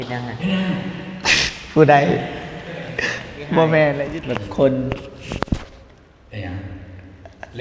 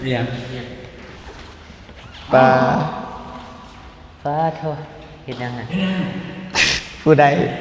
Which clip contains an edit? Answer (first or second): first